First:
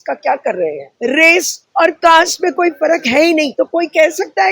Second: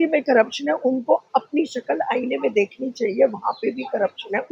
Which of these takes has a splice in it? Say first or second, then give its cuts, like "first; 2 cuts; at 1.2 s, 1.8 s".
first; 2 cuts; at 0.9 s, 3.5 s